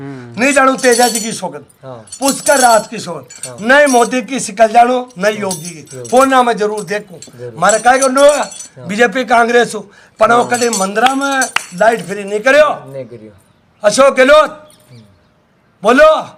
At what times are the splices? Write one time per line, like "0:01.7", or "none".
none

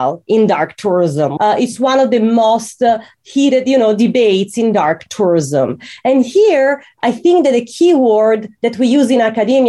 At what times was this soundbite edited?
0:01.3

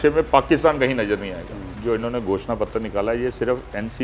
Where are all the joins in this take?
0:01.7

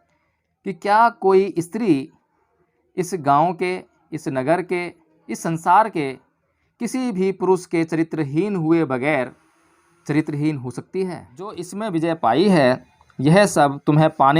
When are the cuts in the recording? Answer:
0:11.8

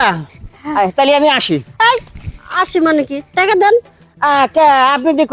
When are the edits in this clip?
none

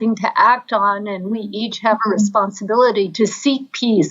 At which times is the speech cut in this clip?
0:03.1

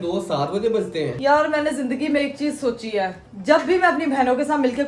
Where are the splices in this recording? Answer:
none

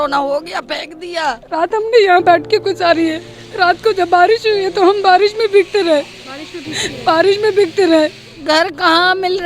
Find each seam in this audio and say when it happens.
0:01.4
0:08.3

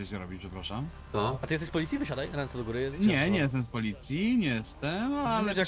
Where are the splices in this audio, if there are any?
none

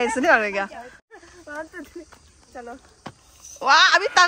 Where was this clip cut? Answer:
0:01.1

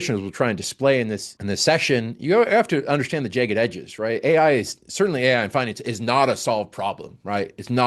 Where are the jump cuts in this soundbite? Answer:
0:01.3

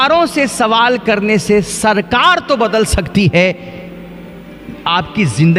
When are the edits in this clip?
none

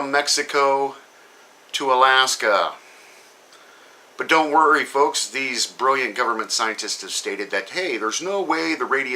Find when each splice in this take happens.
0:02.6

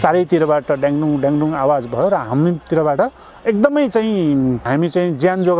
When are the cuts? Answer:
0:04.6

